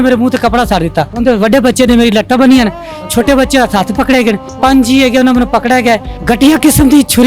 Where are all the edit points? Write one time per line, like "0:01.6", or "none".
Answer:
0:01.1
0:04.5
0:06.1